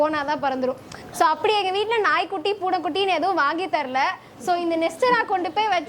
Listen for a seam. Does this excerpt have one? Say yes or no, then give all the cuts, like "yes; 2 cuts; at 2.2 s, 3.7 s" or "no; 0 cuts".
yes; 1 cut; at 1.0 s